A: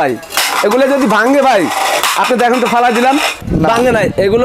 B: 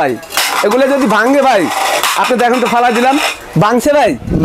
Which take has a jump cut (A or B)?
A